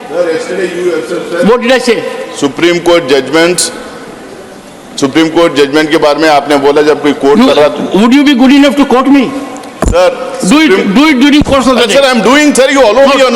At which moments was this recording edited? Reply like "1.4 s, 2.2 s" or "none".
none